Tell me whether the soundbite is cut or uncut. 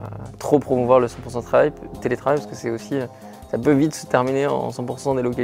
uncut